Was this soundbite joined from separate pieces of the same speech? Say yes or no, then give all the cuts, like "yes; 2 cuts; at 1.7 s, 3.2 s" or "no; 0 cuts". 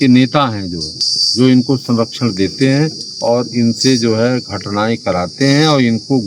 no; 0 cuts